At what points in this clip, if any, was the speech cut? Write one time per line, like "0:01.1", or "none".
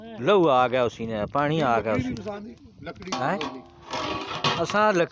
none